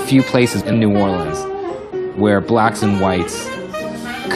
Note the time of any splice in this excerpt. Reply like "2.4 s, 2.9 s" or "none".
none

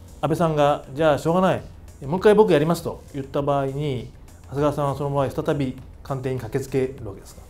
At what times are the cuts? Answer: 3.1 s

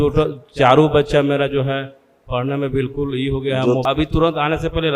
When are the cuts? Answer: 3.8 s

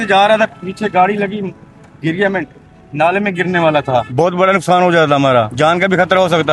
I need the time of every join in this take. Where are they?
4.1 s, 5.5 s

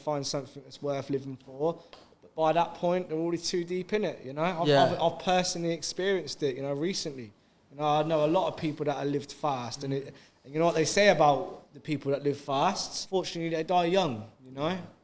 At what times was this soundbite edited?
12.9 s

